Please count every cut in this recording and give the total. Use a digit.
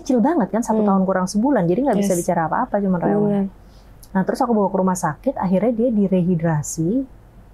0